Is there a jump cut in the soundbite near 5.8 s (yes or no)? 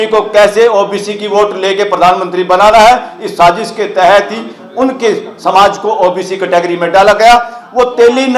no